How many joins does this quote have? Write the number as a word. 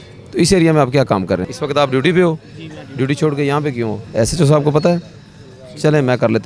two